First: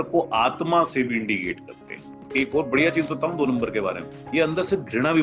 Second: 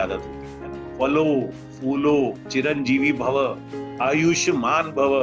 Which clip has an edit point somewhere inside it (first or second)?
first